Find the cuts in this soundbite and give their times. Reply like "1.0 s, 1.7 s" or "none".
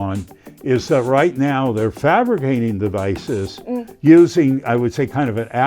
none